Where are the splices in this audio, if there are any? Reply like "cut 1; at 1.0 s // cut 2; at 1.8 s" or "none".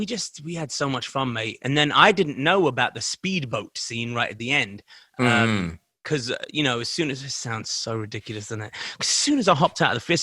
none